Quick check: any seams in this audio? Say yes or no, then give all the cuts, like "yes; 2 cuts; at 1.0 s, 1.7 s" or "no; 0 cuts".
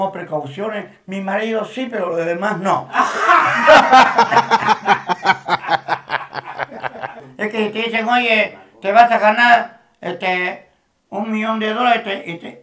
yes; 1 cut; at 7.2 s